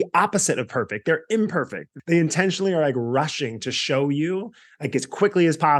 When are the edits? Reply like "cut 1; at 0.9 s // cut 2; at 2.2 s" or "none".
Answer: cut 1; at 1.8 s